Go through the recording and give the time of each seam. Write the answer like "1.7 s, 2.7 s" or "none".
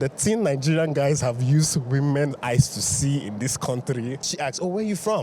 4.3 s

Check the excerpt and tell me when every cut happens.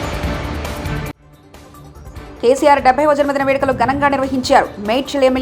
1.8 s

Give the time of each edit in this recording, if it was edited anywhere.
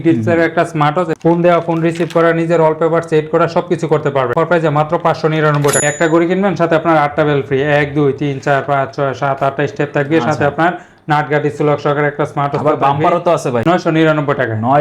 1.1 s, 4.3 s, 5.8 s, 13.6 s

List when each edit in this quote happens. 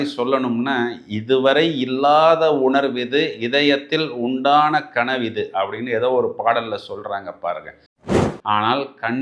8.1 s

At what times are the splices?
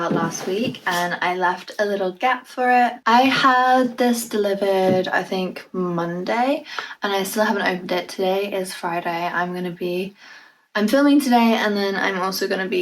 none

